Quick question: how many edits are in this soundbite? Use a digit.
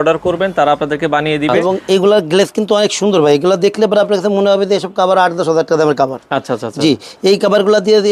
1